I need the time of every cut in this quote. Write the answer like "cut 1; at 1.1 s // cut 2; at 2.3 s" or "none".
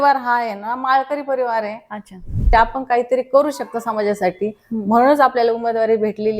cut 1; at 2.5 s